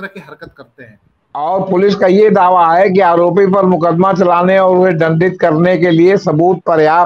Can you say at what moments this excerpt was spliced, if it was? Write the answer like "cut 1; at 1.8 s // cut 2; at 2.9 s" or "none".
cut 1; at 1.4 s